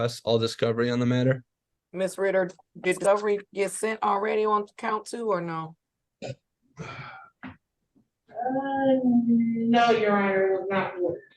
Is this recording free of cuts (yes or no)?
no